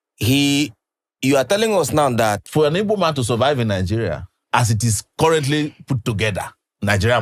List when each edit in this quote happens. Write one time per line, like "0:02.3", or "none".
0:02.4